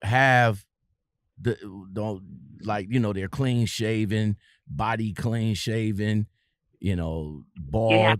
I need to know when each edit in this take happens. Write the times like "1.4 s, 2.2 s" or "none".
none